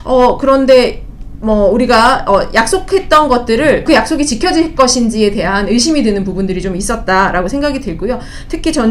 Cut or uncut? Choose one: cut